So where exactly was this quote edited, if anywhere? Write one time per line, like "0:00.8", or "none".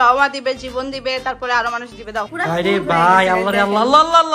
0:02.3